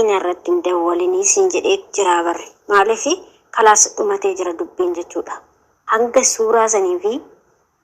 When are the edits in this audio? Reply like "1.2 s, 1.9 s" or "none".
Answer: none

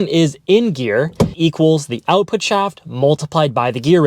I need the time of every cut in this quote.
1.3 s

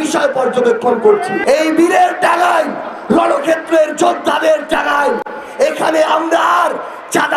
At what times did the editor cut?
1.3 s

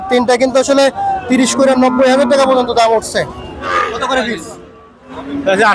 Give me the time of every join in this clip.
3.8 s

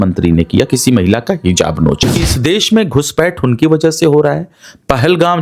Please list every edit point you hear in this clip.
2.3 s

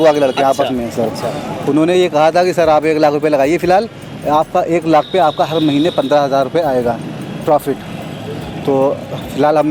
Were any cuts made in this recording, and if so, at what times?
none

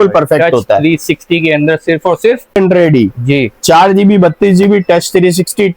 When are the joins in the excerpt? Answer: 2.6 s

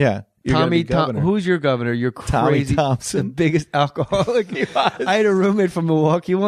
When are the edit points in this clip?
none

